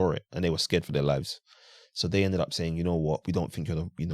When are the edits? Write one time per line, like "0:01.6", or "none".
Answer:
none